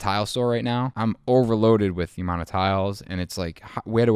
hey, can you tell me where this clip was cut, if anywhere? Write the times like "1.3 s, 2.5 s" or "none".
0.9 s